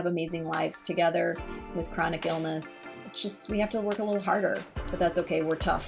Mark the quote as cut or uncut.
uncut